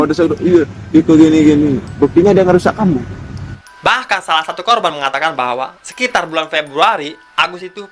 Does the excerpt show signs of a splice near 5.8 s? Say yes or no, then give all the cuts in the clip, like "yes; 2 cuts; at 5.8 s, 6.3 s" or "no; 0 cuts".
no; 1 cut; at 3.6 s